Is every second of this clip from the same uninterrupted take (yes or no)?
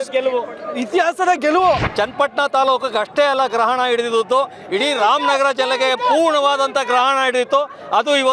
no